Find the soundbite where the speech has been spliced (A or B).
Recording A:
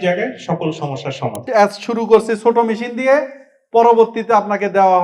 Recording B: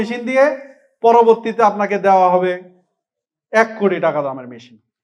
A